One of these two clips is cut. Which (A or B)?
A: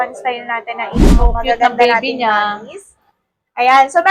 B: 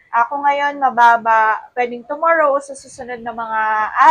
A